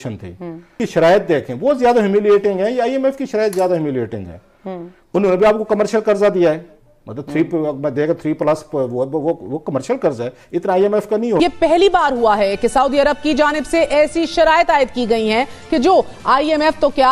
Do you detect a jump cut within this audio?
yes; 2 cuts; at 0.8 s, 11.4 s

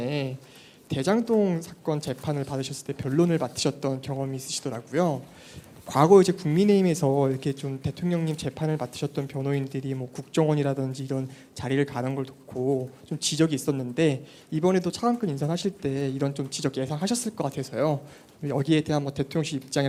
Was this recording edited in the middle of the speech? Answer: no; 0 cuts

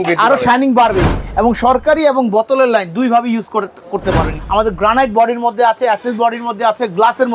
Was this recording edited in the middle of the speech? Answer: yes; 2 cuts; at 1.2 s, 4.4 s

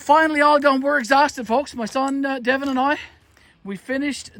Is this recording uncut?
yes; 0 cuts

